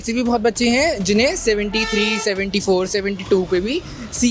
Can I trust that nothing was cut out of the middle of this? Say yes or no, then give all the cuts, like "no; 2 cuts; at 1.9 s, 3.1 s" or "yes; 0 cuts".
yes; 0 cuts